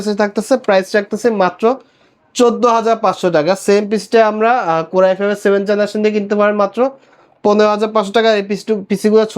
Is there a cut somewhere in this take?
no; 0 cuts

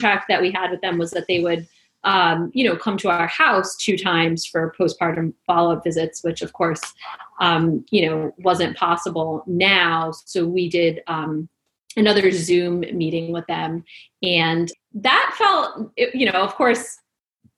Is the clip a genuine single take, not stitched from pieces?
no; 1 cut; at 14.7 s

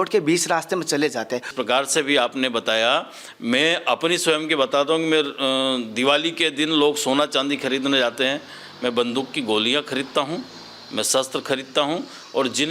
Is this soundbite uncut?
no; 1 cut; at 1.5 s

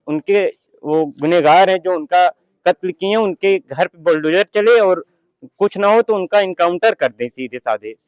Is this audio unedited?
yes; 0 cuts

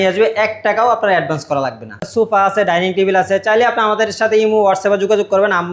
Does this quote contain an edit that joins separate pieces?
yes; 1 cut; at 2.0 s

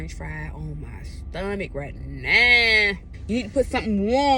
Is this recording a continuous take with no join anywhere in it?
no; 1 cut; at 3.1 s

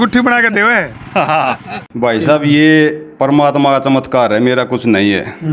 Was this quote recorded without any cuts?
no; 1 cut; at 1.8 s

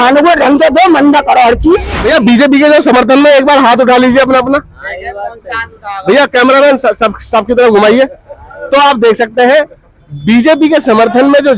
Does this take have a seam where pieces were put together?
yes; 1 cut; at 1.9 s

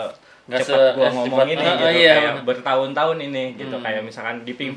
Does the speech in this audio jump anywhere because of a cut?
no; 0 cuts

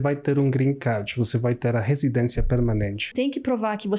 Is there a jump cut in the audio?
yes; 1 cut; at 3.1 s

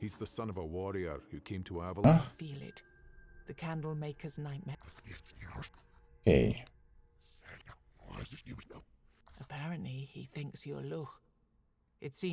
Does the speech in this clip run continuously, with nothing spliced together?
no; 1 cut; at 2.0 s

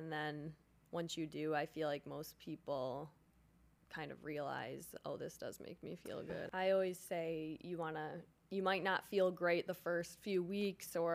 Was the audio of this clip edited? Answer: yes; 1 cut; at 6.5 s

